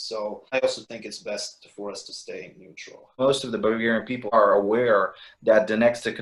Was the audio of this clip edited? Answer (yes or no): no